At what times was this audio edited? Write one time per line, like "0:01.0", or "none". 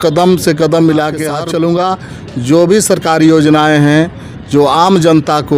0:01.3